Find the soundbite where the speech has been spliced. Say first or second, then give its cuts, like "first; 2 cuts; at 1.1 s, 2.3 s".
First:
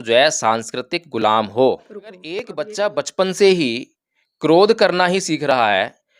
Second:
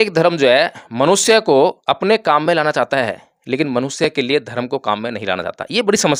first; 1 cut; at 1.9 s